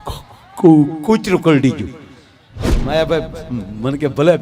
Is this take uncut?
no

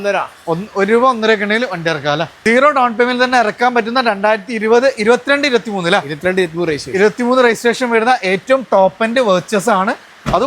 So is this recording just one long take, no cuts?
no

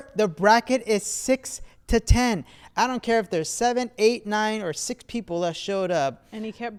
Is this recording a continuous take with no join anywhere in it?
yes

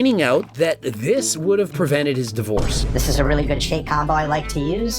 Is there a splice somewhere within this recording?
yes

